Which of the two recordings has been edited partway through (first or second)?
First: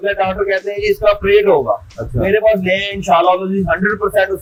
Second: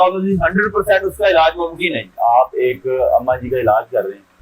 second